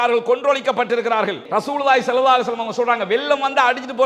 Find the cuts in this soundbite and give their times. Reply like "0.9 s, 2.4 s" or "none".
1.4 s

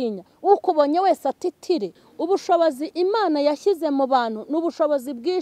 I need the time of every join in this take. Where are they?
2.0 s

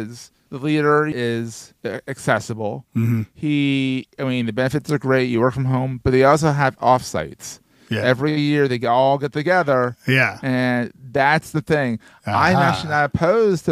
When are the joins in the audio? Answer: 1.1 s

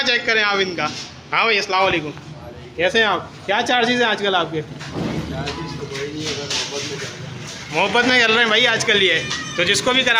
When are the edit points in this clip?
none

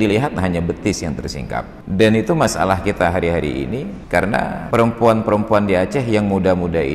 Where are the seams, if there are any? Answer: 1.8 s, 4.0 s, 4.6 s

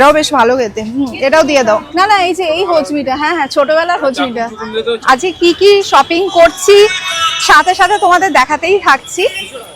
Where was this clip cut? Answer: 1.9 s, 5.0 s

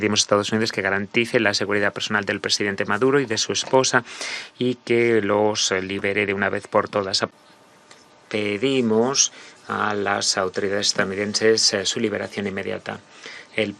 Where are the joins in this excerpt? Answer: 7.3 s

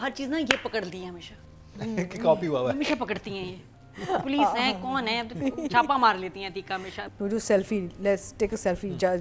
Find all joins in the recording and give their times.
6.9 s

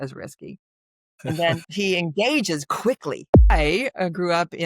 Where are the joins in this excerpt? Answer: 3.5 s

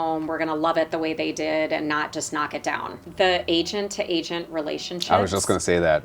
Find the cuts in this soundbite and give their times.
3.0 s

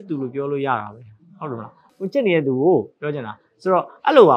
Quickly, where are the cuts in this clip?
1.8 s

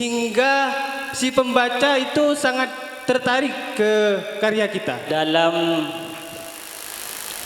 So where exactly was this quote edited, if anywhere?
5.1 s

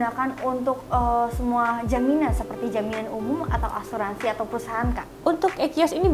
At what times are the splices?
none

